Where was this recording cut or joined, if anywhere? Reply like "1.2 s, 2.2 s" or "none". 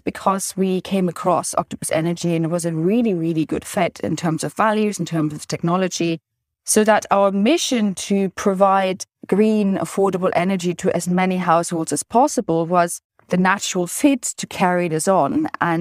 none